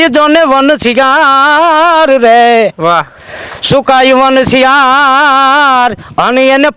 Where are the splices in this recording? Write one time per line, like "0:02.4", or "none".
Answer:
none